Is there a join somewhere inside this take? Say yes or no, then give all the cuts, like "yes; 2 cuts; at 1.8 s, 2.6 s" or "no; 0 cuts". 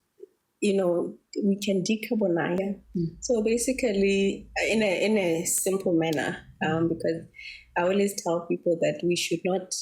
yes; 1 cut; at 2.6 s